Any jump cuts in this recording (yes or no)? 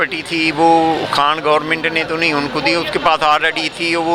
no